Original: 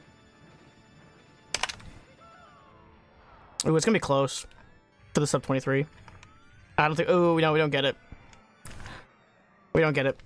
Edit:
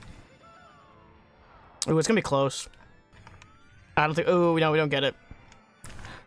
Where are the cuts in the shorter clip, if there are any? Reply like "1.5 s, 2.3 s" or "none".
3.2 s